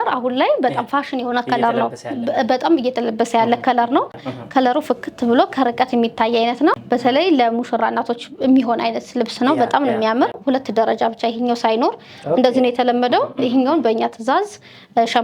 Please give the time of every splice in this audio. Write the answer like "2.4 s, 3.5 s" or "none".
4.2 s, 6.8 s, 10.4 s